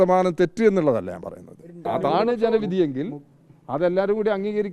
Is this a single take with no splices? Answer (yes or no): no